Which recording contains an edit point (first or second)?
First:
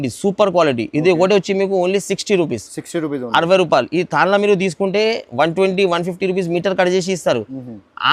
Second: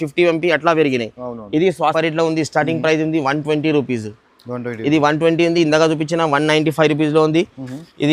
second